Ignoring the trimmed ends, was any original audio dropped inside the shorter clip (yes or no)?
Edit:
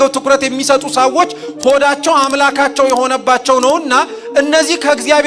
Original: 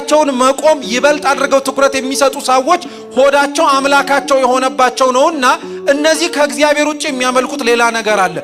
no